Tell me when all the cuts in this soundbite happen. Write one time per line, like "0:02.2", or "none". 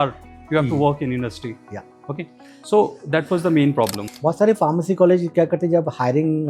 0:04.1